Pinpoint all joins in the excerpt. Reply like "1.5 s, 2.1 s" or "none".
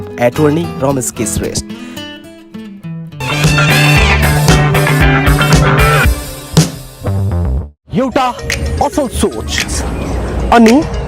3.2 s